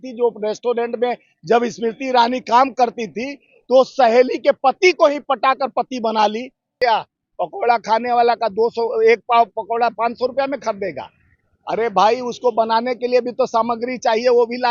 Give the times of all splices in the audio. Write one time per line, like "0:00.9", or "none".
0:06.8